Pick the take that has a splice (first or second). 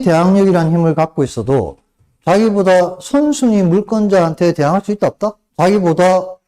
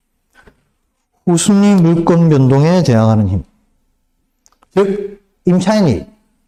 first